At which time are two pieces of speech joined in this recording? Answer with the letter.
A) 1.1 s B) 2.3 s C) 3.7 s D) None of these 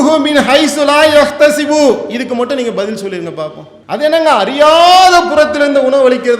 C